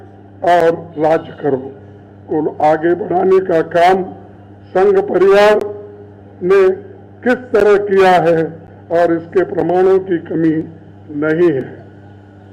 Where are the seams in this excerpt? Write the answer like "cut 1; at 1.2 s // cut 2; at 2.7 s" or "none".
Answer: none